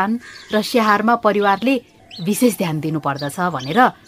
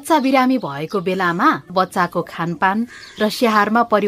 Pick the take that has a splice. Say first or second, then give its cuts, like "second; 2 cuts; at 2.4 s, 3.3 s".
second; 1 cut; at 1.7 s